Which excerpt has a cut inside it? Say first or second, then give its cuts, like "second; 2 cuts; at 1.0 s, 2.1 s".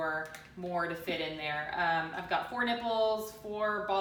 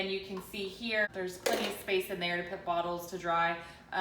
second; 1 cut; at 1.1 s